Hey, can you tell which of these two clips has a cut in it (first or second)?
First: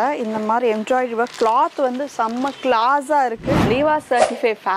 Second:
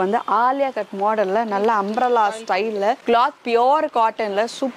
first